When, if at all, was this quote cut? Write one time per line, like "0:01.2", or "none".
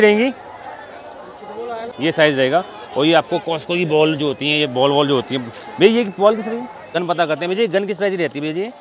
0:01.9
0:06.9